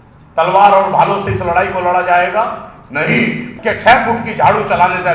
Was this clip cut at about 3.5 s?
yes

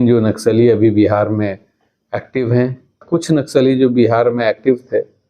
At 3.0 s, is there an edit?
yes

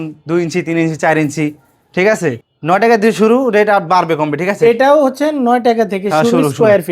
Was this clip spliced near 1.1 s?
no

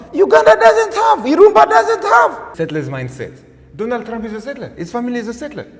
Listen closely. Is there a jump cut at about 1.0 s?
no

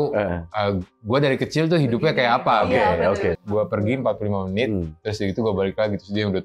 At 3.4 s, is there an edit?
yes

